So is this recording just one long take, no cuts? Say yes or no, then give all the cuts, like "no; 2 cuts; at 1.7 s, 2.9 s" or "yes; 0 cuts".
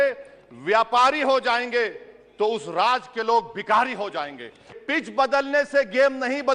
no; 1 cut; at 4.8 s